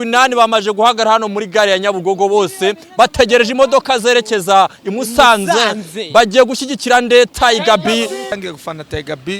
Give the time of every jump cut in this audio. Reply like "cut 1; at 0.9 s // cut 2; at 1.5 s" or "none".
cut 1; at 8.3 s